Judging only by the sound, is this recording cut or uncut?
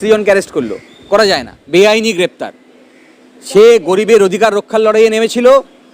cut